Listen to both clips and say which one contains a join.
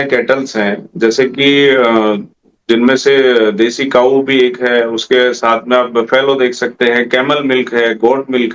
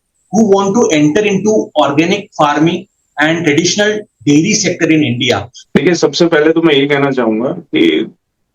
second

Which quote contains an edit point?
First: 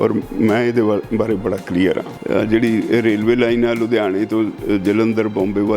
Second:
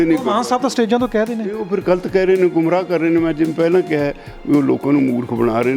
first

